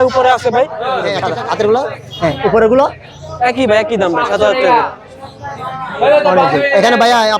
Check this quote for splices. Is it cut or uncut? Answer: cut